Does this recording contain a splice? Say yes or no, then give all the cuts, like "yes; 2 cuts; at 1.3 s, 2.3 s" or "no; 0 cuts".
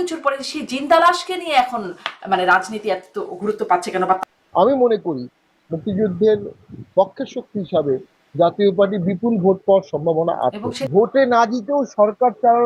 yes; 2 cuts; at 4.2 s, 10.7 s